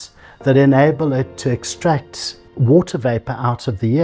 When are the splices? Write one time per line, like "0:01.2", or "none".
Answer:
0:02.4

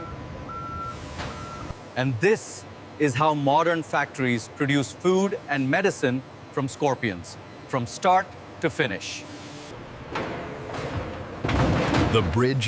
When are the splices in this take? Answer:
none

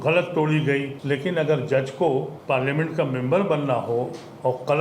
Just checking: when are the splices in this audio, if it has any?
0:00.9
0:02.3

